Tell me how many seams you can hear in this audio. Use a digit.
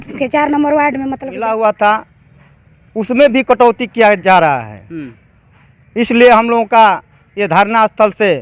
1